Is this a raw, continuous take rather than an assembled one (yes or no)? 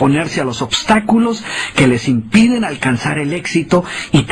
yes